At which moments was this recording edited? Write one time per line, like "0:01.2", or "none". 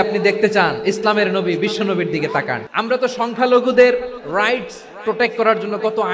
0:02.6